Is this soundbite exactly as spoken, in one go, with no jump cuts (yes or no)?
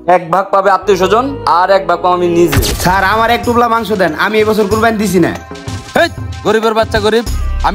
no